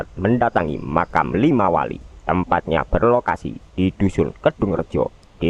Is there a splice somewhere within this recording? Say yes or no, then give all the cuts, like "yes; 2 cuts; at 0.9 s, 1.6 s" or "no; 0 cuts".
no; 0 cuts